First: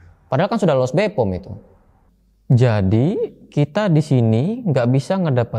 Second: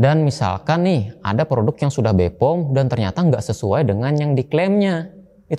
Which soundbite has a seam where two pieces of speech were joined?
first; 1 cut; at 1.7 s

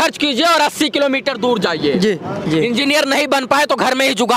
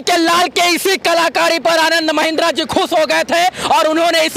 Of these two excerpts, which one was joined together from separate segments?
first; 1 cut; at 2.4 s

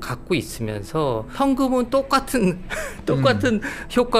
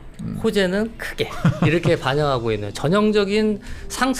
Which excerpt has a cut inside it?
first; 1 cut; at 1.3 s

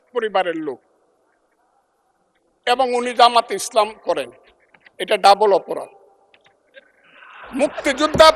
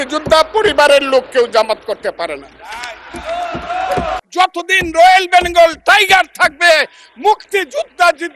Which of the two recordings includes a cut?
second; 1 cut; at 4.2 s

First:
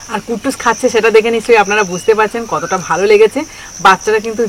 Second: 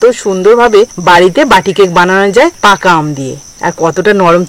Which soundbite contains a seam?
second; 3 cuts; at 0.9 s, 2.6 s, 3.4 s

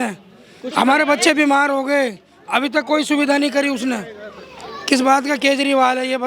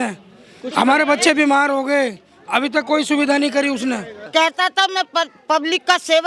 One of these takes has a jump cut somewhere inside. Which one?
second; 1 cut; at 4.1 s

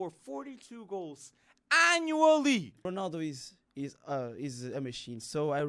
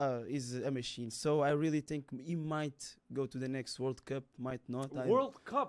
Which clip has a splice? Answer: first; 1 cut; at 2.8 s

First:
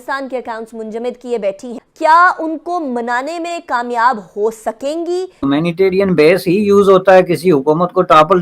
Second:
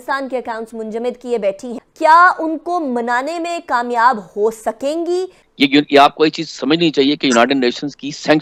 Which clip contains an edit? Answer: first; 1 cut; at 5.4 s

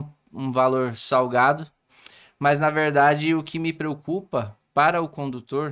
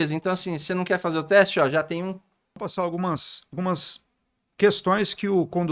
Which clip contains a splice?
second; 1 cut; at 2.6 s

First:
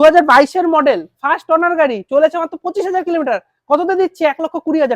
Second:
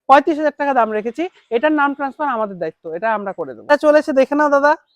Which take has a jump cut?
second; 1 cut; at 3.7 s

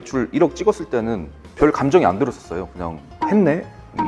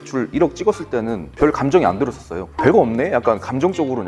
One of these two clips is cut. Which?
second; 2 cuts; at 1.2 s, 2.5 s

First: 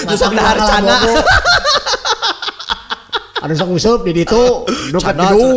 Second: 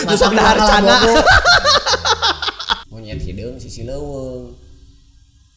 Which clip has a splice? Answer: second; 1 cut; at 2.9 s

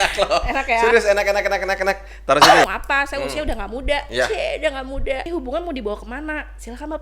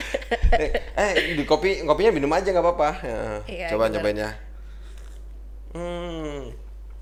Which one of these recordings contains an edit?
first; 2 cuts; at 2.6 s, 5.2 s

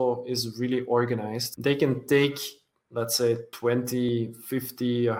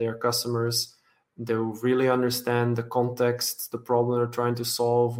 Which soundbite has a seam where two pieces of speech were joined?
first; 2 cuts; at 1.4 s, 3.7 s

